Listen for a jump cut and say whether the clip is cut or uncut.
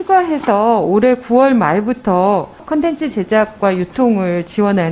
cut